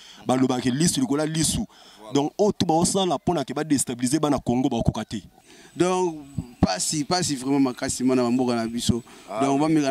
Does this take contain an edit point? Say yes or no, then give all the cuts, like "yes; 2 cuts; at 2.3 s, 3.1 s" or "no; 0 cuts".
yes; 1 cut; at 5.4 s